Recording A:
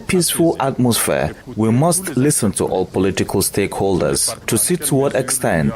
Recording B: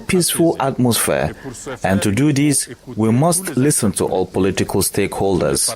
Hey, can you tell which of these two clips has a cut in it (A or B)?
A